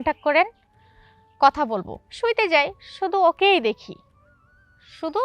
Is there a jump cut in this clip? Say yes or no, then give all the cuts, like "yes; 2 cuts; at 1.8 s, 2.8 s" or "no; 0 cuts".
yes; 1 cut; at 2.0 s